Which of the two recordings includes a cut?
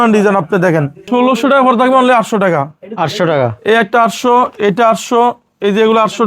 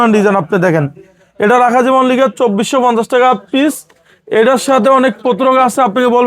first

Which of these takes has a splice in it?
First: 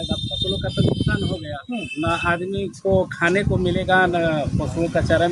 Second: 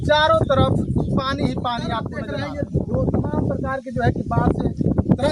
second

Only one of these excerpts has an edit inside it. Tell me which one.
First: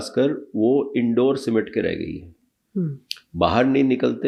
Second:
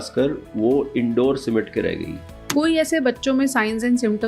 second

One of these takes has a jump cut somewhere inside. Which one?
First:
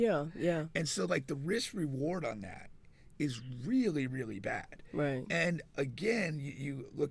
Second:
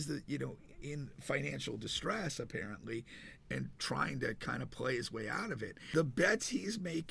second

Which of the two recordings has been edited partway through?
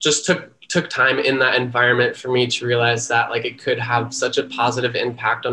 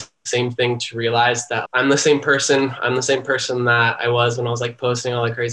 second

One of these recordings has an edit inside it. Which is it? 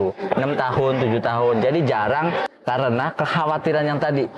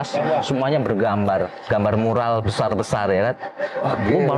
first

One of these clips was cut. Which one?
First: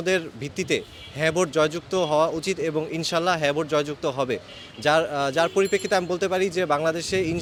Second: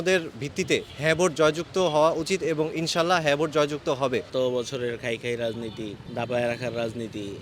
second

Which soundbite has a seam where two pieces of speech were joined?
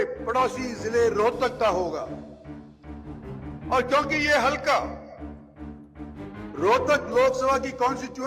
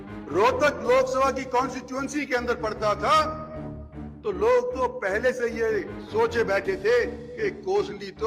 first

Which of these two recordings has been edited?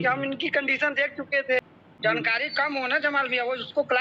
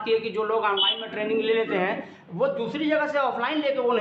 first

